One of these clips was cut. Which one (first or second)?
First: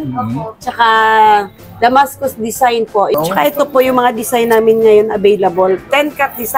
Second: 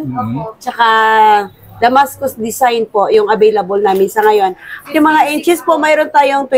first